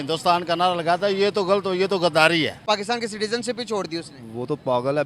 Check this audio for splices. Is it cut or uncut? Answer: cut